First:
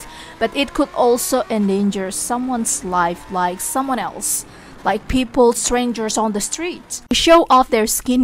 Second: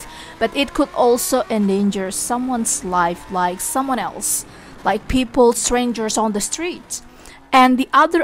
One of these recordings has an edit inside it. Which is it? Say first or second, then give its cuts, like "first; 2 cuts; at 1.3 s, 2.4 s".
first; 1 cut; at 7.1 s